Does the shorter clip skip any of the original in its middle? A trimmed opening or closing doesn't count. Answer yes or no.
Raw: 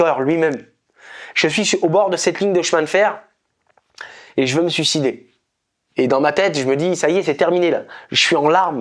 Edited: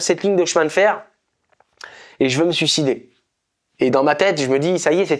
no